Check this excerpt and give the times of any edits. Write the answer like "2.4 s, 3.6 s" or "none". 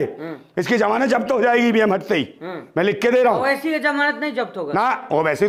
none